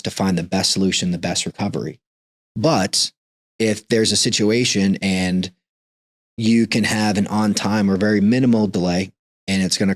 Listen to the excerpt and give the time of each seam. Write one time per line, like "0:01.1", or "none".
none